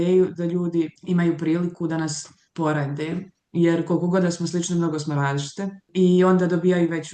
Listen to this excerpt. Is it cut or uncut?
cut